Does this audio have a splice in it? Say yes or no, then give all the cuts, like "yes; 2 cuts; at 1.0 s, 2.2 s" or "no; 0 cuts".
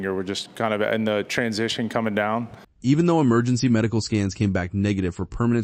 no; 0 cuts